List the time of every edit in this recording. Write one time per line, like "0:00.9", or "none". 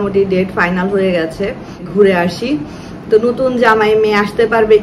0:01.9